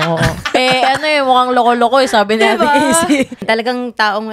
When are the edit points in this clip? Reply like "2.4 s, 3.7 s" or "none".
3.4 s